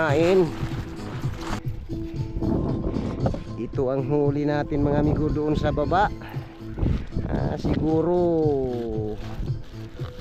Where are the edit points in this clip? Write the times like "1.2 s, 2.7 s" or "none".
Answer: 1.5 s